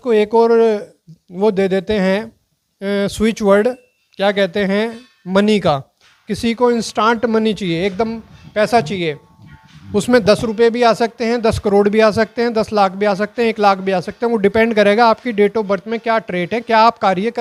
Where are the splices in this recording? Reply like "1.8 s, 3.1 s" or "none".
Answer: none